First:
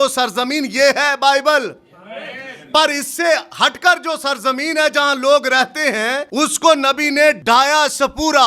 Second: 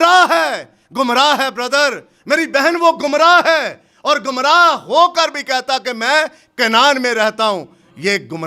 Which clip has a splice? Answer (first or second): first